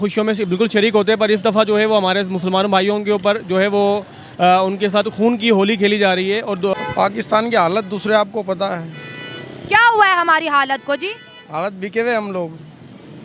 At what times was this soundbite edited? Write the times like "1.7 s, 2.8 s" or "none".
6.7 s